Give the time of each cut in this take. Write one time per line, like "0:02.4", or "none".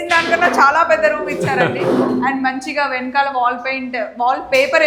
none